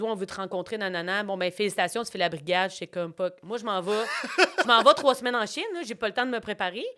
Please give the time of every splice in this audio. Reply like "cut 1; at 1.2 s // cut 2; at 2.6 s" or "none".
cut 1; at 3.1 s